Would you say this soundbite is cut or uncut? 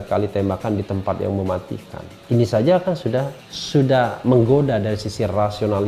uncut